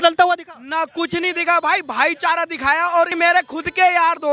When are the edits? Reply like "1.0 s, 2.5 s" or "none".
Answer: 3.1 s